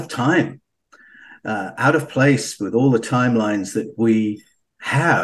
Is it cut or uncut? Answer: uncut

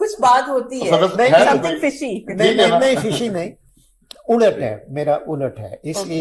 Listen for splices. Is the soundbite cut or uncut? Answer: uncut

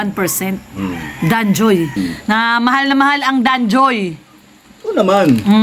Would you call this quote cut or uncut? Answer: cut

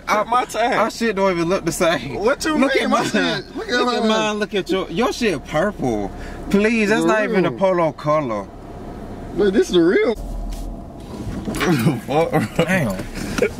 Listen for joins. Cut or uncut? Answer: cut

